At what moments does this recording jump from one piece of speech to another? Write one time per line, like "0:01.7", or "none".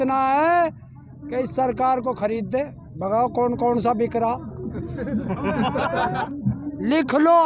0:06.2